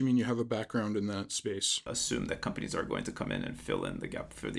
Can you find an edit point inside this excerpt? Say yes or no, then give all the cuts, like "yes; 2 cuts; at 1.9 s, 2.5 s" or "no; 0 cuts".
yes; 1 cut; at 1.9 s